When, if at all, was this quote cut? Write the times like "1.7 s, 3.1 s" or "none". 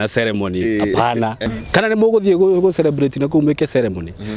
1.4 s